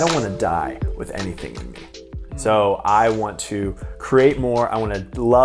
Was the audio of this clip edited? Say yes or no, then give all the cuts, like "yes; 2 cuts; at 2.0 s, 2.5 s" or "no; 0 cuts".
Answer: no; 0 cuts